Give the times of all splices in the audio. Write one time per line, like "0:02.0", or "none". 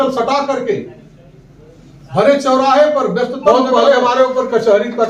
0:03.4